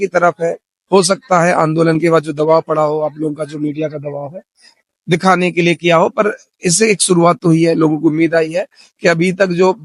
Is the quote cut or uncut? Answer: uncut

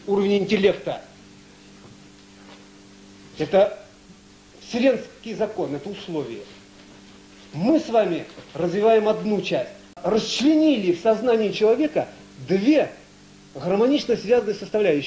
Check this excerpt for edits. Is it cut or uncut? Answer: cut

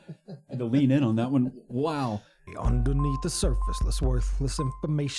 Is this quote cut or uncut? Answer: cut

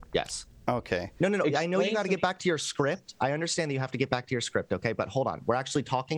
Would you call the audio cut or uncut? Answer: cut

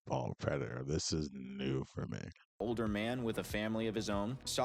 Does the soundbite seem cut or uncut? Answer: cut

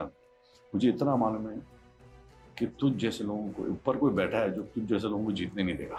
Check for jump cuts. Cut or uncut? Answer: uncut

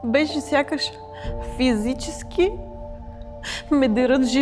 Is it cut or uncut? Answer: uncut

